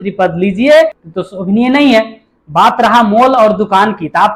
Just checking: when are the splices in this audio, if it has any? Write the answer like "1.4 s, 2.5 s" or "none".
1.0 s